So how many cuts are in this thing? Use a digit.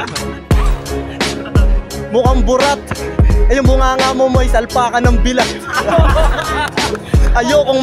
0